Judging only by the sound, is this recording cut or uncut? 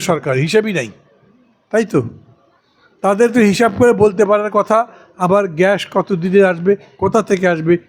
uncut